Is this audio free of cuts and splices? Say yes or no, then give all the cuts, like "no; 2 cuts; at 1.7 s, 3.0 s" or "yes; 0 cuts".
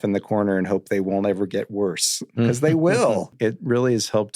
no; 1 cut; at 3.3 s